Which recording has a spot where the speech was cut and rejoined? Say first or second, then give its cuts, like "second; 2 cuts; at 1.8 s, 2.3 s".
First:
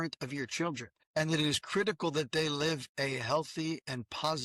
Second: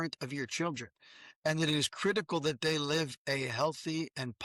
first; 1 cut; at 0.9 s